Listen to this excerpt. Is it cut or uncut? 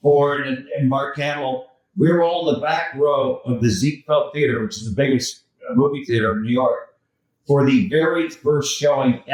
uncut